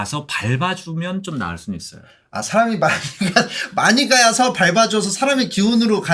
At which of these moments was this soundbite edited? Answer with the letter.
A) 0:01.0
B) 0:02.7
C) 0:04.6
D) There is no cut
D